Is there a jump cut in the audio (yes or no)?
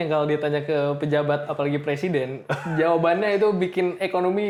no